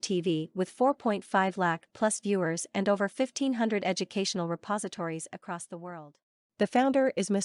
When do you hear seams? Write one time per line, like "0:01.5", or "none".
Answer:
none